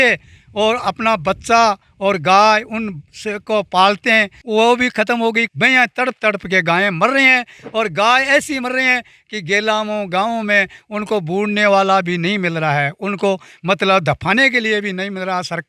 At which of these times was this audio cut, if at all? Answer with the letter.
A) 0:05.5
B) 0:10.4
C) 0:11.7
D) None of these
A